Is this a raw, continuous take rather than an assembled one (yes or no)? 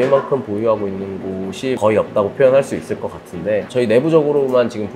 no